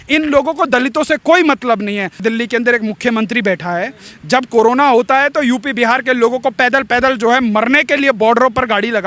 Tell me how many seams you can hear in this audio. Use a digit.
1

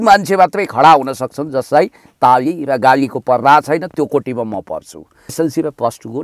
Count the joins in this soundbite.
1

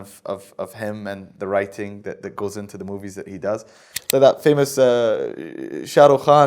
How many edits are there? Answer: 1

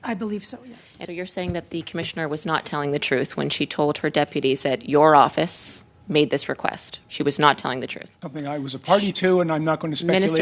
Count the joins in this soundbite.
2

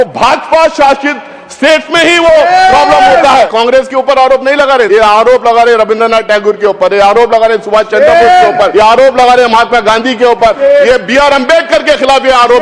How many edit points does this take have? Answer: 4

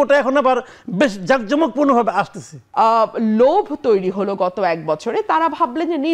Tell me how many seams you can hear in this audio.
1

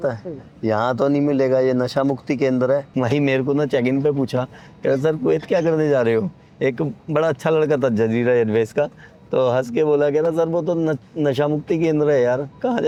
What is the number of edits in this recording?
0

